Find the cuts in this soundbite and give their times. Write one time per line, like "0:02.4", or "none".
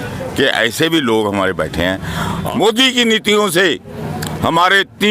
0:02.4